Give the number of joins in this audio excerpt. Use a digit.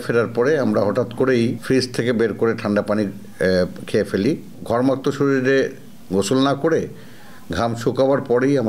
2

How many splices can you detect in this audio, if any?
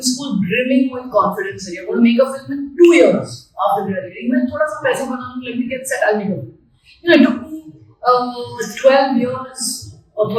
0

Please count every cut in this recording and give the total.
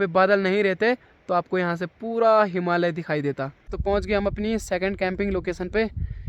1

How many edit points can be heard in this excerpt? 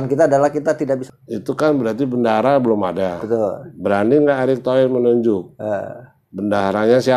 1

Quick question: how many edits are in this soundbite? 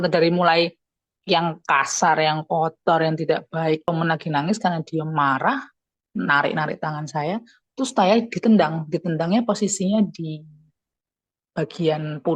1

